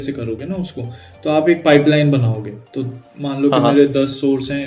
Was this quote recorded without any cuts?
yes; 0 cuts

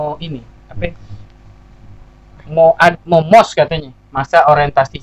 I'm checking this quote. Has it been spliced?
no; 0 cuts

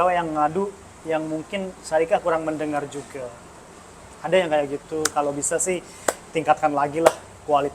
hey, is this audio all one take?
yes; 0 cuts

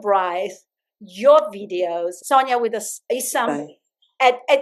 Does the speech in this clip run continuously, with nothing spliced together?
yes; 0 cuts

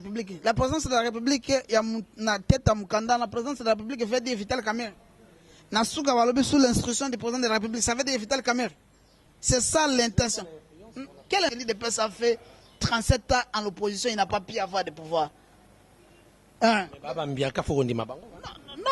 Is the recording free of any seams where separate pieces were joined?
no; 1 cut; at 11.5 s

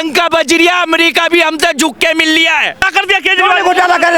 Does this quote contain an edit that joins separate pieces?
yes; 1 cut; at 2.9 s

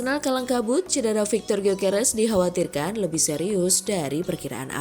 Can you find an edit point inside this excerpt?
no; 0 cuts

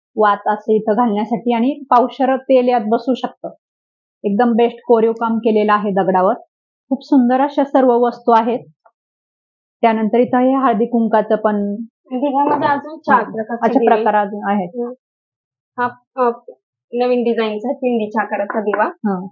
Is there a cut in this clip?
no; 0 cuts

